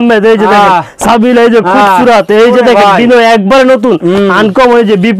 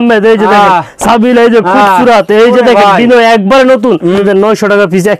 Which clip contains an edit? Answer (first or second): second